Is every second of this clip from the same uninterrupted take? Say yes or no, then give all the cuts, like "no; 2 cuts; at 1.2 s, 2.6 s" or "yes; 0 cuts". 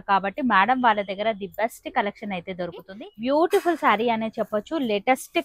no; 1 cut; at 3.0 s